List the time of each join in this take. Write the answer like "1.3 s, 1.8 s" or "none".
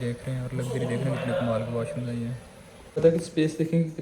3.0 s